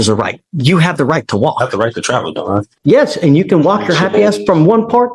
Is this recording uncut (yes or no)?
no